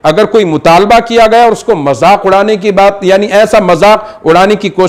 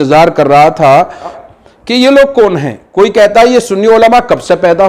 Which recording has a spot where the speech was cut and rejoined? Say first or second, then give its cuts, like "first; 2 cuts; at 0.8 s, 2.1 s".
second; 1 cut; at 1.4 s